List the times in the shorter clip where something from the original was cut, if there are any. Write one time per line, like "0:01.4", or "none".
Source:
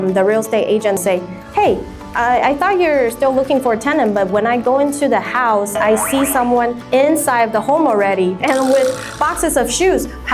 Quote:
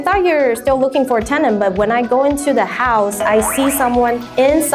none

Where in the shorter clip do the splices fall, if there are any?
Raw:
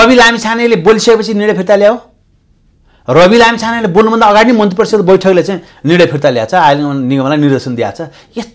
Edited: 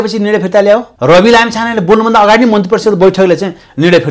0:00.9

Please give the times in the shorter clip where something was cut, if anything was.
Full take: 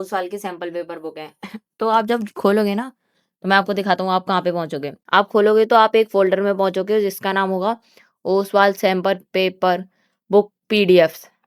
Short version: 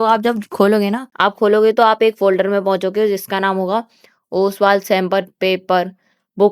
0:01.1

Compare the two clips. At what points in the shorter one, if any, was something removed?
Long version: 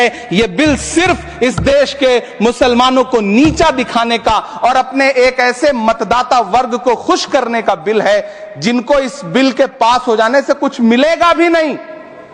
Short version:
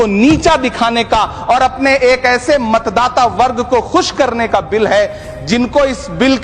none

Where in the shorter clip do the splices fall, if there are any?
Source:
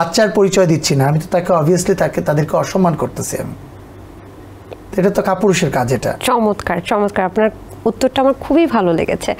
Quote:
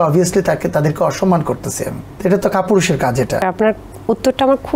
0:02.0
0:03.4

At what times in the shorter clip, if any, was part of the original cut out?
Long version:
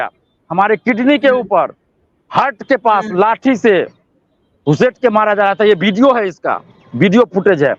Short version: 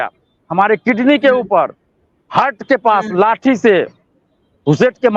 none

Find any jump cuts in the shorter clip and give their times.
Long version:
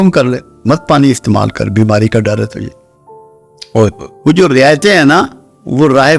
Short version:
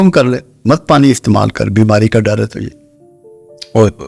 none

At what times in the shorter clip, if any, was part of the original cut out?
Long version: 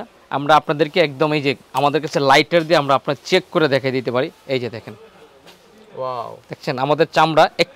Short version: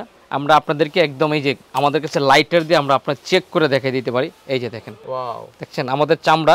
0:04.9

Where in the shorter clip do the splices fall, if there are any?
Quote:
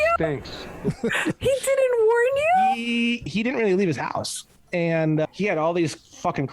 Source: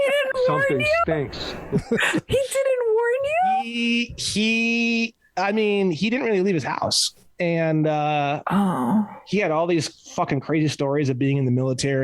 0:03.3
0:05.3

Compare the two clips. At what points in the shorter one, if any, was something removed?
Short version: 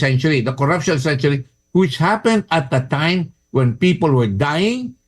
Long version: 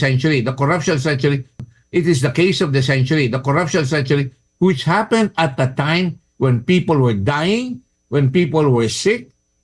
0:01.5

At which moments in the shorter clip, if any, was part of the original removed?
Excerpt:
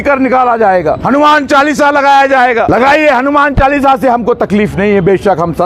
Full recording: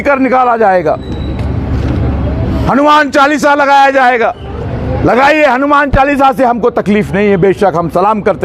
0:01.0
0:02.7

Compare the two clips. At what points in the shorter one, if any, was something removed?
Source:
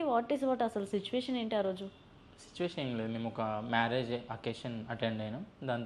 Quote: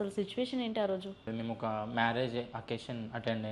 0:01.3

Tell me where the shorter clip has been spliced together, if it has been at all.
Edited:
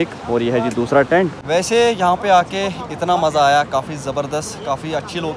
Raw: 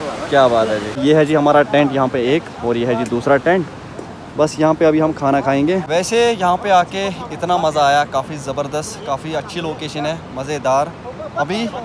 0:01.4

